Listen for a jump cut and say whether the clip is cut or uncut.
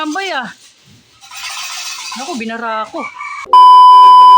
cut